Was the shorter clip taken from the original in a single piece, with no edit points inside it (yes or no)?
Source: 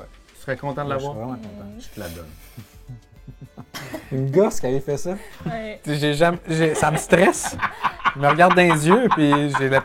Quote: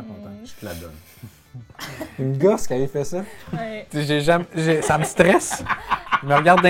no